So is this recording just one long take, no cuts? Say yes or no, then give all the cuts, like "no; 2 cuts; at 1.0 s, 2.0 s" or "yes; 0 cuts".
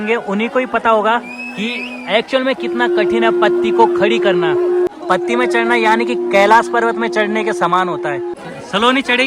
no; 2 cuts; at 4.9 s, 8.4 s